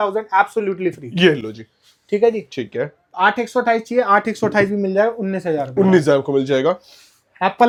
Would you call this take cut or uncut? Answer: uncut